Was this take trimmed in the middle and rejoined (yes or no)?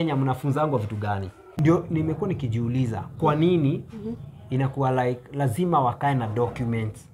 yes